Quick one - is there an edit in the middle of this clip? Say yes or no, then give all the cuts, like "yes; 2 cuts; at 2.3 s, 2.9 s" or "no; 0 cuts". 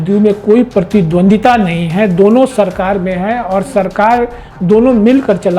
no; 0 cuts